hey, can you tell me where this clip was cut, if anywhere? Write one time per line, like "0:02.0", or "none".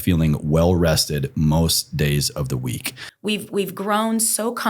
0:03.0